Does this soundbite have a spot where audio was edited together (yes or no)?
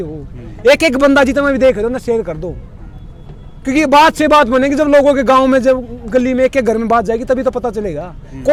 no